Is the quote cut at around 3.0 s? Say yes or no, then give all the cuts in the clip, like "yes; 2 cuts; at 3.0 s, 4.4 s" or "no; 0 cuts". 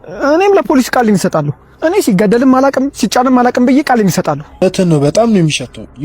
no; 1 cut; at 4.6 s